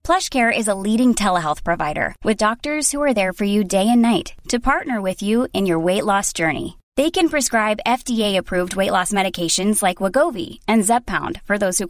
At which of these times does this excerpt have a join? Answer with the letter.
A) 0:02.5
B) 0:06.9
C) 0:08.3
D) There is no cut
D